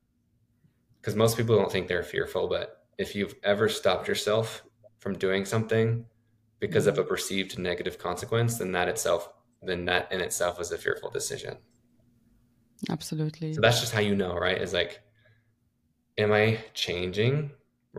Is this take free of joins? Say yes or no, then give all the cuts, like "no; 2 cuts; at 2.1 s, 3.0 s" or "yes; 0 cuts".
yes; 0 cuts